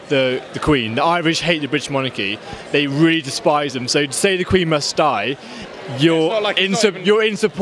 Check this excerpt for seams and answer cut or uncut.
uncut